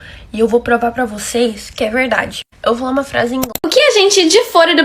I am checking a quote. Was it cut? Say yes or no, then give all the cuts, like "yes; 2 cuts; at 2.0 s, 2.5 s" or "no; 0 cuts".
yes; 1 cut; at 3.6 s